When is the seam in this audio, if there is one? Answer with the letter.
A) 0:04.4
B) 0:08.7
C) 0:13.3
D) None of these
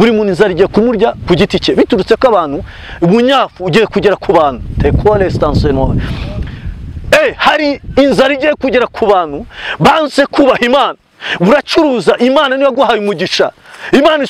D